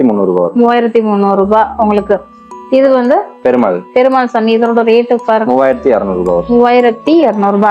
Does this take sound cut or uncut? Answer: uncut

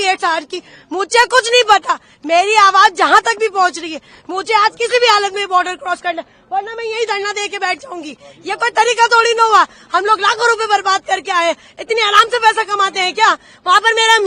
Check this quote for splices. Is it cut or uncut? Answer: uncut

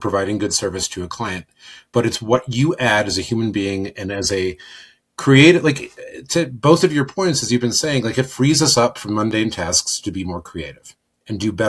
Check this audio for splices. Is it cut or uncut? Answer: uncut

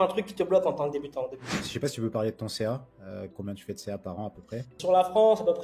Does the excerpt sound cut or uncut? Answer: cut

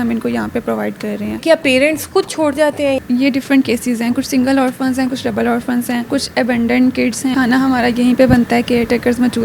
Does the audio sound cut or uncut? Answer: cut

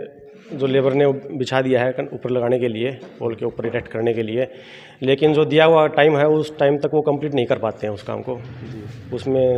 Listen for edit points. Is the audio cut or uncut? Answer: uncut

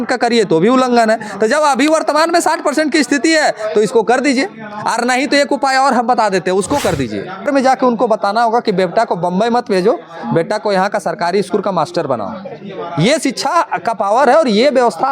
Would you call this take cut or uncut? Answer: cut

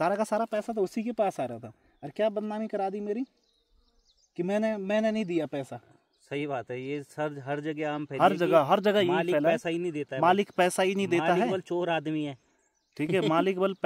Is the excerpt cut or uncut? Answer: uncut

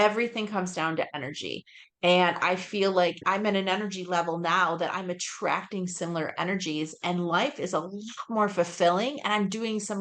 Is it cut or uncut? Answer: cut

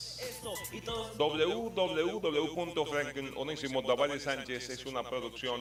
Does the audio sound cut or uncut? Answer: uncut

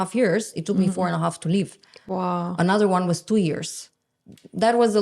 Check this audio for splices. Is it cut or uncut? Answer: uncut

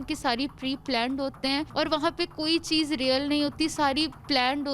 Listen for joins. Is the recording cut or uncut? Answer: cut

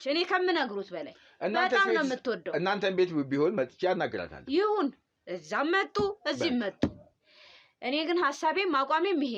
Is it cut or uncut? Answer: uncut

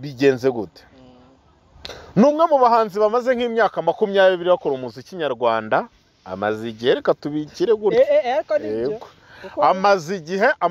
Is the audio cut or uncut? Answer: uncut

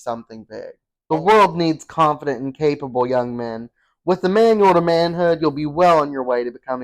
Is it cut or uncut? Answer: cut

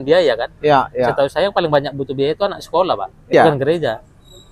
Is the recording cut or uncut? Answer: cut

